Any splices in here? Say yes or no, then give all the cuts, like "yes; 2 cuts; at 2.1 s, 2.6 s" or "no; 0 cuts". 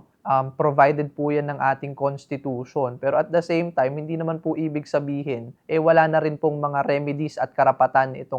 no; 0 cuts